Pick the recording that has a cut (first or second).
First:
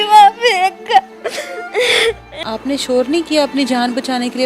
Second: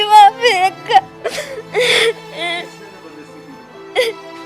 first